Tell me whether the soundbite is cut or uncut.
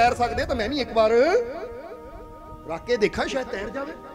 uncut